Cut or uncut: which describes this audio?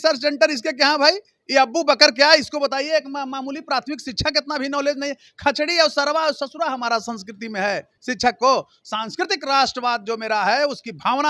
uncut